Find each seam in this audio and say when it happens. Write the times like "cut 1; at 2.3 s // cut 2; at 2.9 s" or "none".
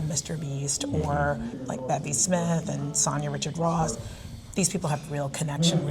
cut 1; at 1.6 s